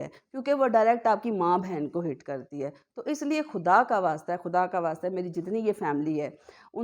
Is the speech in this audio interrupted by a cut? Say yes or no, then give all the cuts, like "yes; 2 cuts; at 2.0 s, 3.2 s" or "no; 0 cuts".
no; 0 cuts